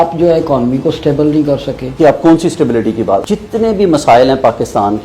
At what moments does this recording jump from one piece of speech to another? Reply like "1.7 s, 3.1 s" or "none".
1.9 s, 3.2 s

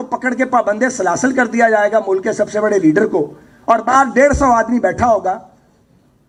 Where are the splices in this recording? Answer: none

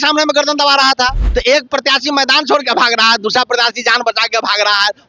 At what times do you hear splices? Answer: 1.2 s

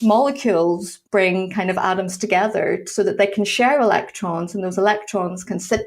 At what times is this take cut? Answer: 0.9 s

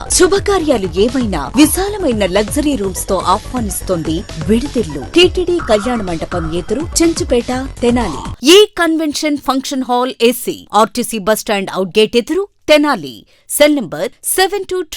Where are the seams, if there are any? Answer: 5.0 s, 8.2 s

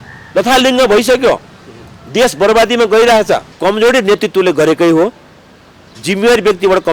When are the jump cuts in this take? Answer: 3.5 s

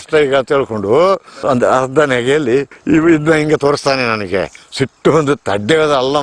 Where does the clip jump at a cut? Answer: 1.3 s, 2.7 s

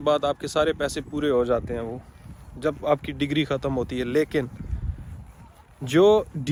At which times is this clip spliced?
none

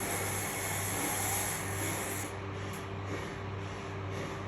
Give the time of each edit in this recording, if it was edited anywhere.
none

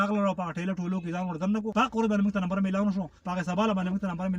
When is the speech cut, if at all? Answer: 1.7 s, 3.2 s

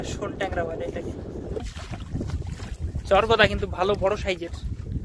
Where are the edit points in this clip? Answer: 1.7 s

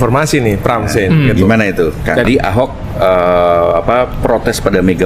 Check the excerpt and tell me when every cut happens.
2.3 s

